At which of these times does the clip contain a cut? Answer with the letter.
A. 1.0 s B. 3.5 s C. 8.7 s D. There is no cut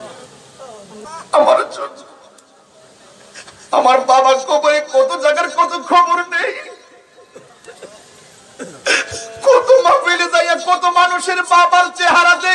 A